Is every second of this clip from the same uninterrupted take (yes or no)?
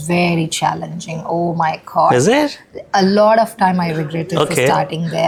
yes